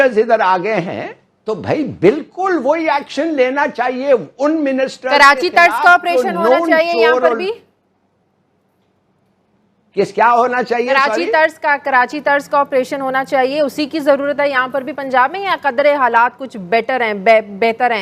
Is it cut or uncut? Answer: cut